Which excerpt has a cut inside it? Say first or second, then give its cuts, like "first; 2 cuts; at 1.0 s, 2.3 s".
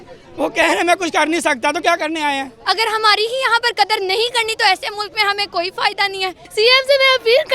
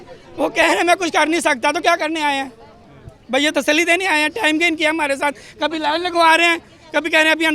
first; 2 cuts; at 2.5 s, 6.4 s